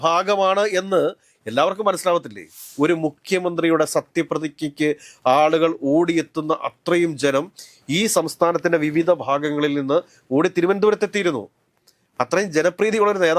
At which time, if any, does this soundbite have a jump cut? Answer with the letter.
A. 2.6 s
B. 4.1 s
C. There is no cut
A